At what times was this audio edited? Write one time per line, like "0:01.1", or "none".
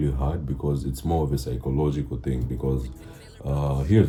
none